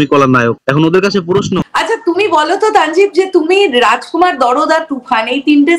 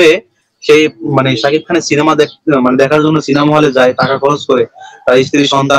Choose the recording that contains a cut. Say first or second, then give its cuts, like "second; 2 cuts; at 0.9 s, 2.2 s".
first; 1 cut; at 1.6 s